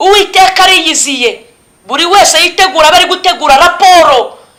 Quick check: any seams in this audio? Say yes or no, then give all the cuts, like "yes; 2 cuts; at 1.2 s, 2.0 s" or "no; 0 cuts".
no; 0 cuts